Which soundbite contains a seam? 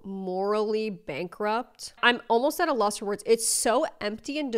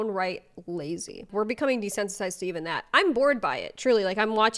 second; 1 cut; at 1.2 s

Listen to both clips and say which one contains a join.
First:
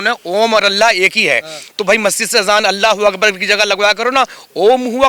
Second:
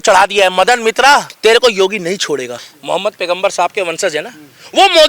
second; 2 cuts; at 1.3 s, 2.7 s

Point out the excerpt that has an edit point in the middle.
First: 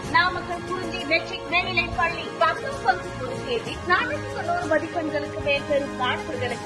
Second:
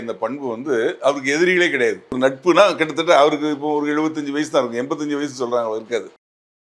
second; 1 cut; at 2.1 s

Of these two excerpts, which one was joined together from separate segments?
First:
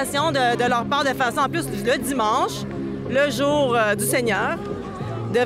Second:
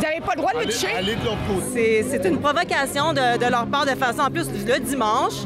second; 1 cut; at 1.6 s

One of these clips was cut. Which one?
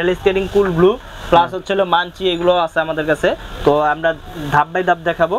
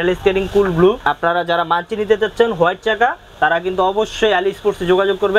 second; 1 cut; at 1.1 s

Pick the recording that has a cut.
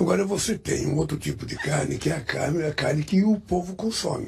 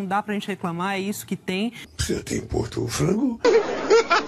second; 2 cuts; at 1.8 s, 3.4 s

